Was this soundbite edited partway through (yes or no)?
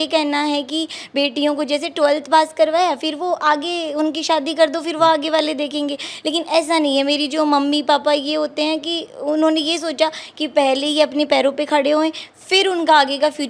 no